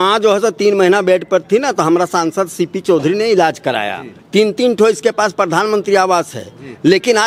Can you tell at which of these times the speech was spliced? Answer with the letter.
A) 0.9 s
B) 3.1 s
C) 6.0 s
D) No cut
D